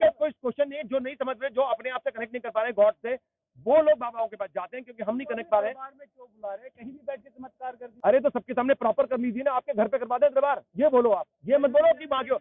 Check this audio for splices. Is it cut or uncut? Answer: cut